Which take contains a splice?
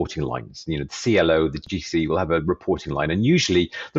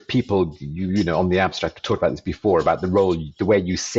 first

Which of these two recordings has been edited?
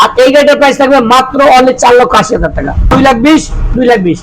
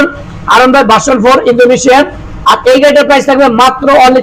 first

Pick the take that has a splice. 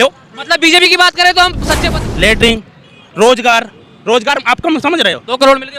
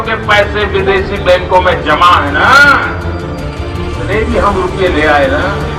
first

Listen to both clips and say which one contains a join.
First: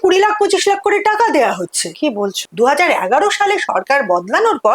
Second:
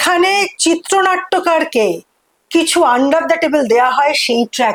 first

